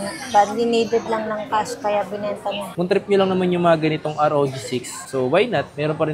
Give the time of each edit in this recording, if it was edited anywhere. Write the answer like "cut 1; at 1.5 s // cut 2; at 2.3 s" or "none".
cut 1; at 2.7 s

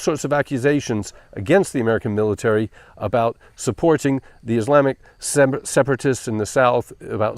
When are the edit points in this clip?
cut 1; at 1.2 s

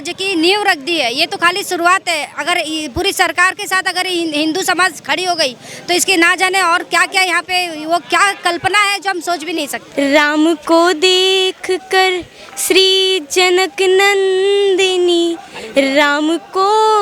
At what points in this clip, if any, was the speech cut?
cut 1; at 9.8 s

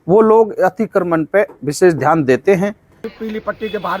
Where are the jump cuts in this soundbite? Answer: cut 1; at 2.9 s

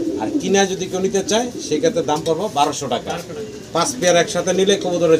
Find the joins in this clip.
none

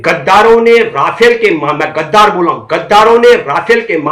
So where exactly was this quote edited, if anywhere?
none

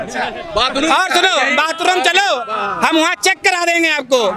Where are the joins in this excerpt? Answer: none

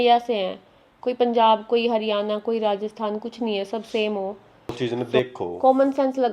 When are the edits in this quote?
cut 1; at 5.1 s

